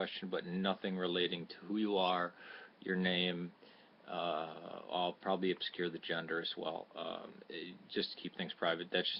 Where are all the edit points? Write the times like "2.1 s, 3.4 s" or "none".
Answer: none